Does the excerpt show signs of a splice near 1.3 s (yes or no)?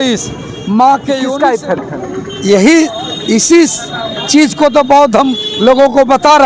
yes